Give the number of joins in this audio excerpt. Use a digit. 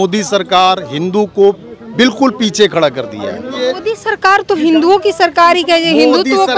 1